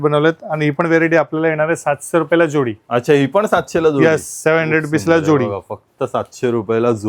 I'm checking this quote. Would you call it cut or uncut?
uncut